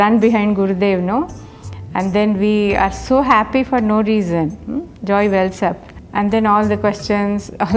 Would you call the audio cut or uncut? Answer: uncut